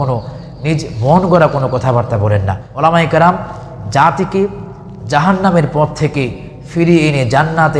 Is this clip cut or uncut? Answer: cut